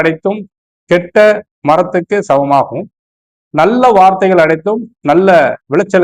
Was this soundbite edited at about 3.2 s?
no; 0 cuts

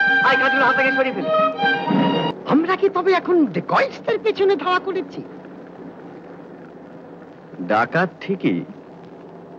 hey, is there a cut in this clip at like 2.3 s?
yes; 1 cut; at 2.3 s

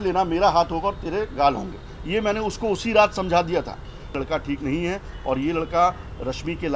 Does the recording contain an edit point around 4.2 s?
yes; 1 cut; at 4.2 s

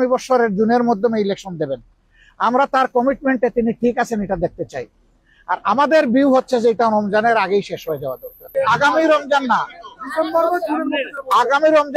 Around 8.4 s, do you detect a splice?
yes; 1 cut; at 8.4 s

